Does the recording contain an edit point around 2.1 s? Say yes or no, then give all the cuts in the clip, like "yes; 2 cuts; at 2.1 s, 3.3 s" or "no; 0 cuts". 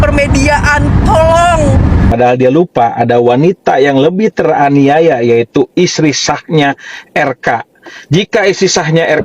yes; 1 cut; at 2.1 s